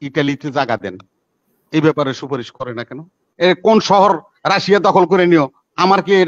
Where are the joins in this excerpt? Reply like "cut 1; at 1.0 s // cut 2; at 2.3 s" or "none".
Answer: cut 1; at 3.2 s